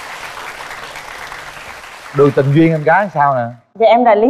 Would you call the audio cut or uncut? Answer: uncut